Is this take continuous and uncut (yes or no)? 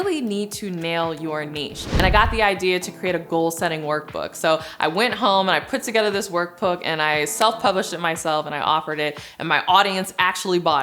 no